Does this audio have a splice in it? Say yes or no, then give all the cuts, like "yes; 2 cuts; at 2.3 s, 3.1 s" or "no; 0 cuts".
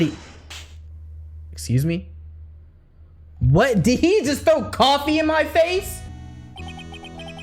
yes; 1 cut; at 6.1 s